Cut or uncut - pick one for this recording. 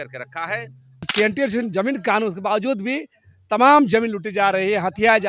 cut